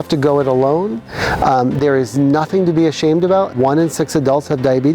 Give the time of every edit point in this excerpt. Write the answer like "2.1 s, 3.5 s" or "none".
3.5 s